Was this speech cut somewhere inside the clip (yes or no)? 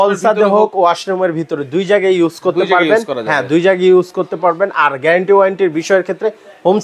no